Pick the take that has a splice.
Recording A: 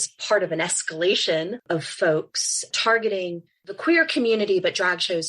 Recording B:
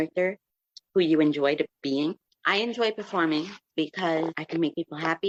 A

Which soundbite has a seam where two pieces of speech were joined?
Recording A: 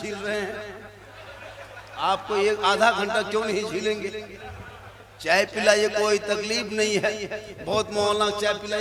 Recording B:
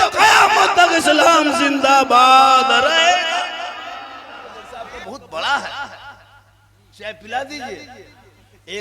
B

